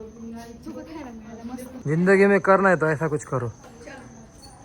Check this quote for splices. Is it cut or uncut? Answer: cut